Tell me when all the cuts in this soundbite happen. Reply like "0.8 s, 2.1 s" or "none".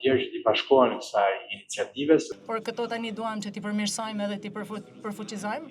2.3 s

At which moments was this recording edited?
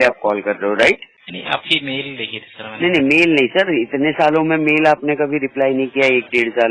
1.2 s

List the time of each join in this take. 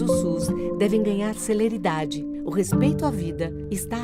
none

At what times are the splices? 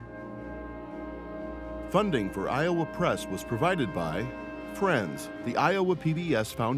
1.9 s

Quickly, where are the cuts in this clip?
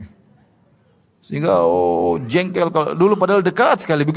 none

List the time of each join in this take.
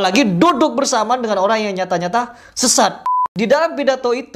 3.1 s

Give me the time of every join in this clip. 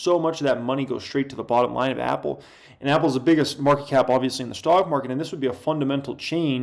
none

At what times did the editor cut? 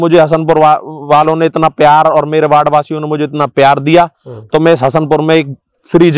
none

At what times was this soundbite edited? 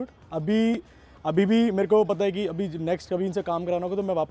none

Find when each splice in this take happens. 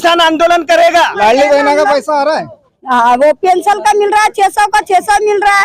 1.1 s

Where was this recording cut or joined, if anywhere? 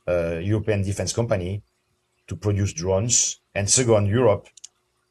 3.4 s

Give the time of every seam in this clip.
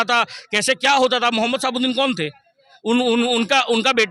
none

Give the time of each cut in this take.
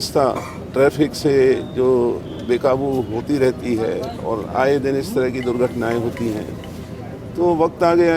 none

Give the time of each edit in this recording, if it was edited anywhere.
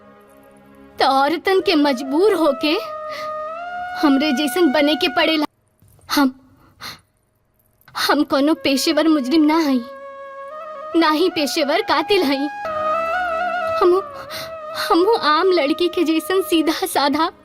5.5 s, 12.7 s

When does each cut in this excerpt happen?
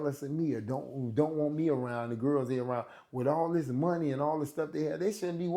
none

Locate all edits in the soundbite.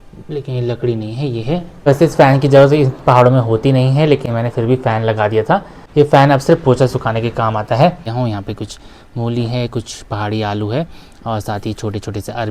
1.9 s, 8.1 s

